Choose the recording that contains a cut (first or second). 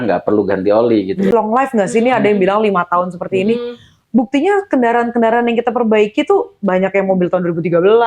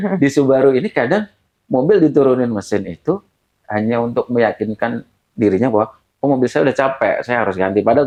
first